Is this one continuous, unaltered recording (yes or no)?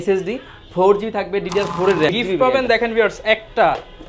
no